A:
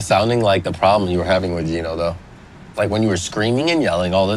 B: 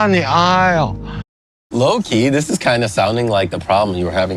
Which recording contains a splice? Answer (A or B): B